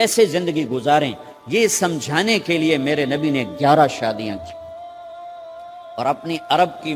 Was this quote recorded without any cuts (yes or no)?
no